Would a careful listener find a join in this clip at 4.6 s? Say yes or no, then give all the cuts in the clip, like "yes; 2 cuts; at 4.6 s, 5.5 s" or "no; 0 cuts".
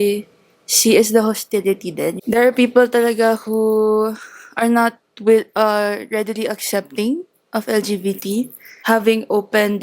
no; 2 cuts; at 2.1 s, 8.7 s